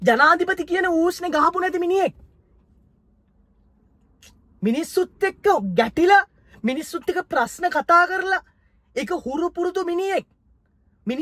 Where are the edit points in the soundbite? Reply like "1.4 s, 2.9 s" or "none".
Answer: none